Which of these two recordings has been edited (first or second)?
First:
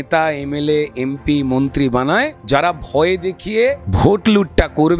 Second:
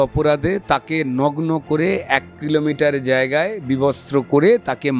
first